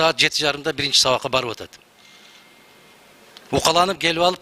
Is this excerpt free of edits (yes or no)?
yes